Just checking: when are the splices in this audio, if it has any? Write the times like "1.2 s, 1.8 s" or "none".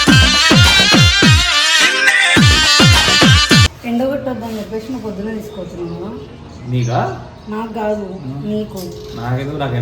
3.8 s

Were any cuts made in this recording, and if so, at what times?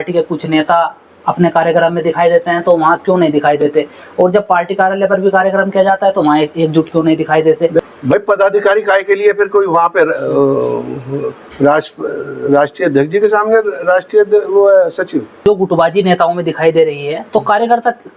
7.8 s, 15.4 s

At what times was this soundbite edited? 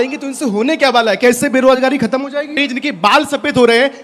2.6 s

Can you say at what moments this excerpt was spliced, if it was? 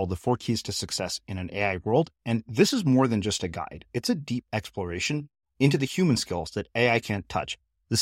none

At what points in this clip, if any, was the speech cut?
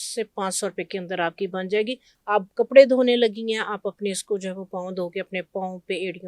2.1 s

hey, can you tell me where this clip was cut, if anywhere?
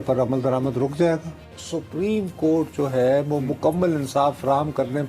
1.4 s

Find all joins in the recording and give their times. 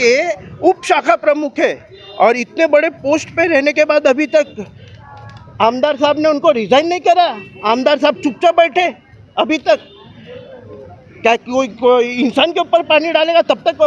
none

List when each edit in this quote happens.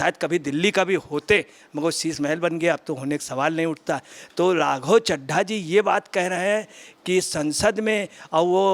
none

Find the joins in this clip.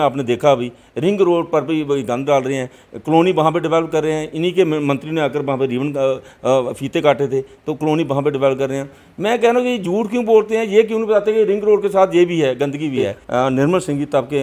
13.2 s

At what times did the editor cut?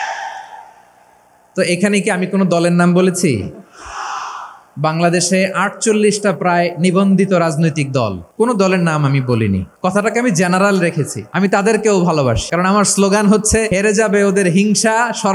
8.2 s, 9.7 s, 11.2 s, 12.5 s, 13.7 s

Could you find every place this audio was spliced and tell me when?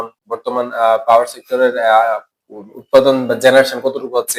none

